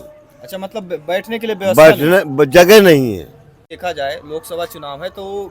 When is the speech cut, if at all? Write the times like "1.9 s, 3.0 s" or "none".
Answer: 3.7 s